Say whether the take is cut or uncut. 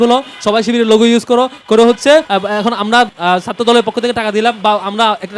cut